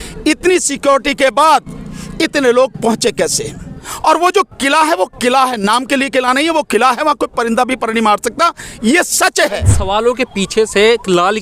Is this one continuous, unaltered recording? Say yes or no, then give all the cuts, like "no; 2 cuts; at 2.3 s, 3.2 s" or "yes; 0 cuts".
no; 2 cuts; at 3.8 s, 9.8 s